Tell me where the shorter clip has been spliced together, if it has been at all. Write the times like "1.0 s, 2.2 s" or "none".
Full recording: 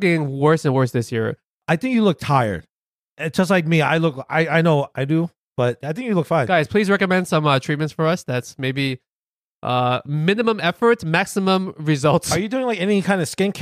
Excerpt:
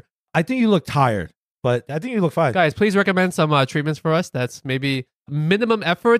1.5 s, 5.3 s